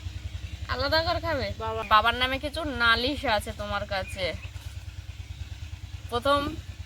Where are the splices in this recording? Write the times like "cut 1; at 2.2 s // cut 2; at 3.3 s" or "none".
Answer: cut 1; at 1.8 s

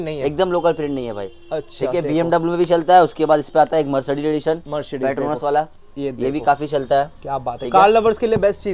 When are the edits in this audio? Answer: none

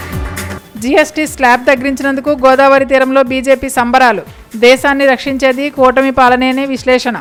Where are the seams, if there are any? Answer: none

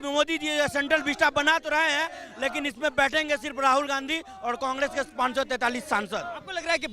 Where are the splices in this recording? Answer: none

